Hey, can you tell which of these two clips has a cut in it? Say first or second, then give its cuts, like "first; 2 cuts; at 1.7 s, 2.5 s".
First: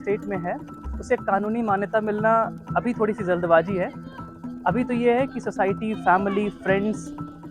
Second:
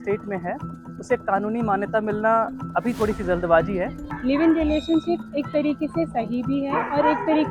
second; 1 cut; at 4.0 s